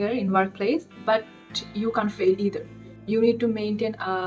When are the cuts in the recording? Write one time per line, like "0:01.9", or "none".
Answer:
none